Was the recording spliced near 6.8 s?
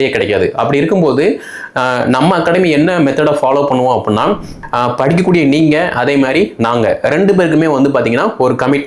no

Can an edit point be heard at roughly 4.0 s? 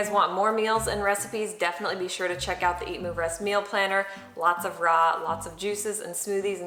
no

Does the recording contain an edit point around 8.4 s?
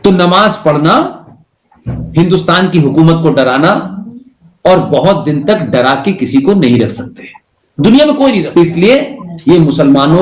yes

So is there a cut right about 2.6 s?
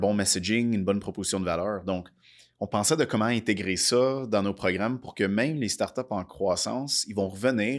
no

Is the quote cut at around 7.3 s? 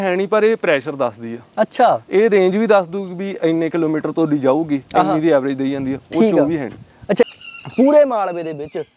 yes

